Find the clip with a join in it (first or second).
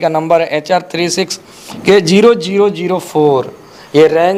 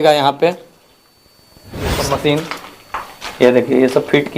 second